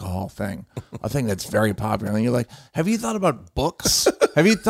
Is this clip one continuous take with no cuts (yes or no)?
yes